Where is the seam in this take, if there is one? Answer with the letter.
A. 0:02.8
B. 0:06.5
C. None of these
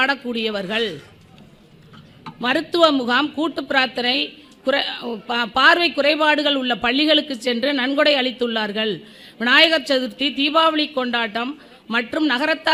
C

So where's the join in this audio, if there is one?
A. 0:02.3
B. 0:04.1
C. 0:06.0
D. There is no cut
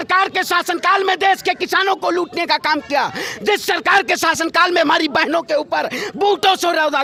D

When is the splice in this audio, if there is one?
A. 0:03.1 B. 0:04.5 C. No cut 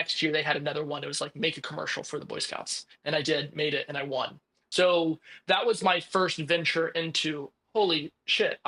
C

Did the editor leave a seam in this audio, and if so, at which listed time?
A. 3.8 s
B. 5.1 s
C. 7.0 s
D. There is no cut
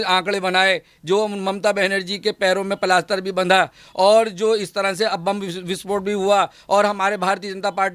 D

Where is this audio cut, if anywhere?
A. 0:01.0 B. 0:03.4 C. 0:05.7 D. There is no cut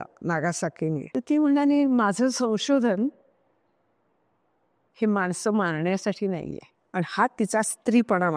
A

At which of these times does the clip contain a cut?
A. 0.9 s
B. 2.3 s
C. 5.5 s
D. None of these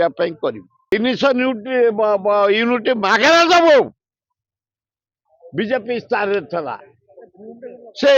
A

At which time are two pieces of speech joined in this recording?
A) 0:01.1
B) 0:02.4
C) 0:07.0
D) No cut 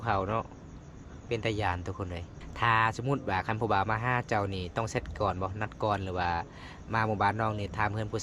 B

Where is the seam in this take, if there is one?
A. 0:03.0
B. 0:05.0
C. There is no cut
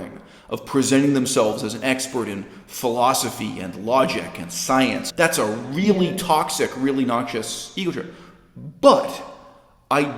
B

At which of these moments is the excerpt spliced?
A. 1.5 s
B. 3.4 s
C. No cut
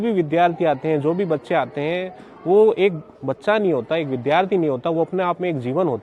C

